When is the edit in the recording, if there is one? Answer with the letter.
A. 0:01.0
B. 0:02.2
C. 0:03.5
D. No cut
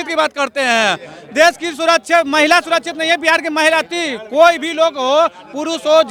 D